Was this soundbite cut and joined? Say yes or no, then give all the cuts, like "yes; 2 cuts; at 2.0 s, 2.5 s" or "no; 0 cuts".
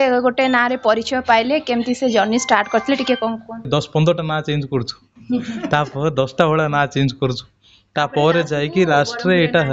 yes; 1 cut; at 3.7 s